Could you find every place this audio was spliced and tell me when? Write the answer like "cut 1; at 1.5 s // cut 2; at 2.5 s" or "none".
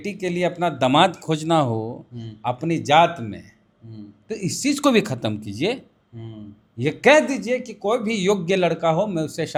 none